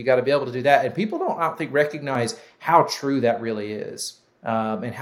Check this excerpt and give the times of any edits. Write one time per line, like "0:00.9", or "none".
0:02.1